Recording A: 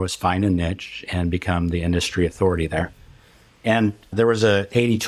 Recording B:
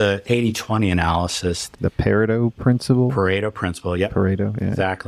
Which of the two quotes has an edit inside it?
B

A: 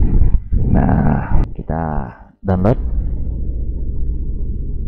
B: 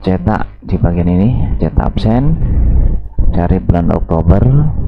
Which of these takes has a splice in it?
A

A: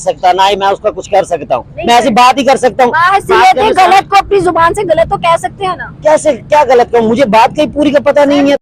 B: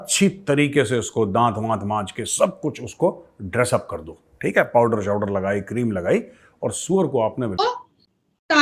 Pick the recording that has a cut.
B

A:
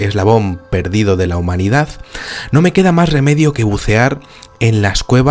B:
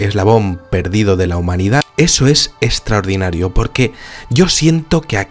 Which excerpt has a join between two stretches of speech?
A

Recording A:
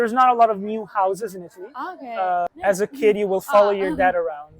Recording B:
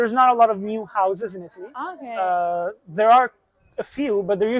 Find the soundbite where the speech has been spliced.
A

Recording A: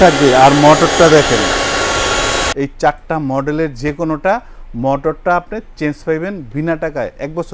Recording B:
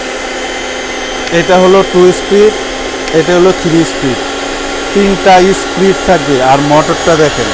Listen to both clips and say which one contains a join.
A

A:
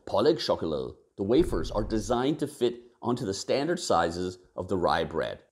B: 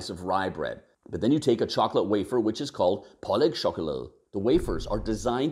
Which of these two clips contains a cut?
B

